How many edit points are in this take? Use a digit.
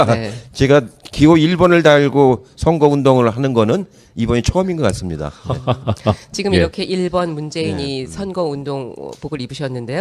0